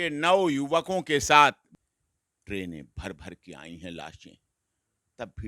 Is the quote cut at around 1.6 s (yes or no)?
yes